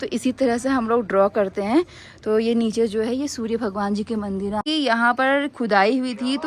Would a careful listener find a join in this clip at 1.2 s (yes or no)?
no